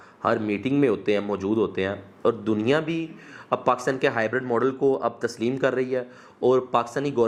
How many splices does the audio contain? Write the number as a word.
zero